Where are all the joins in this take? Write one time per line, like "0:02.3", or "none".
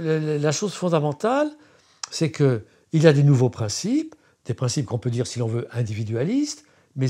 none